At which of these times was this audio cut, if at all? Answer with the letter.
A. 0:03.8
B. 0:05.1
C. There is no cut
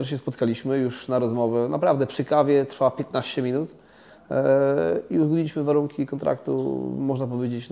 C